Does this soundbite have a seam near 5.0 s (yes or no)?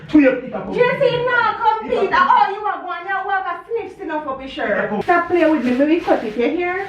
yes